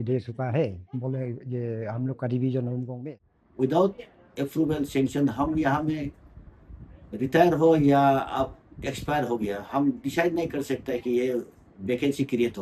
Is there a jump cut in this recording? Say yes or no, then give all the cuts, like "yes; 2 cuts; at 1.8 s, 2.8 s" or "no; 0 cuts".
yes; 1 cut; at 2.9 s